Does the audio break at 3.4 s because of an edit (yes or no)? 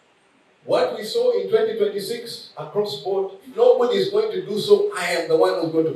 yes